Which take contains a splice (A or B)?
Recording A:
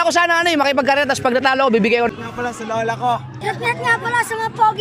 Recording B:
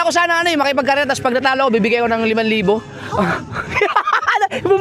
A